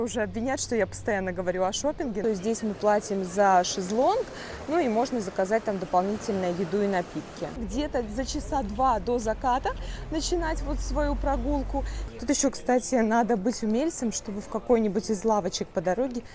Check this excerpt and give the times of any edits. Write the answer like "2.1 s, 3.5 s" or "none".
2.2 s, 7.6 s, 12.0 s